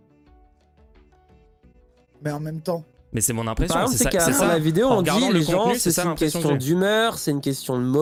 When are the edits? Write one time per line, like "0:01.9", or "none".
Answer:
none